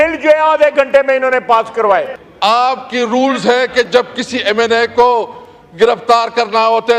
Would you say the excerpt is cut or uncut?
cut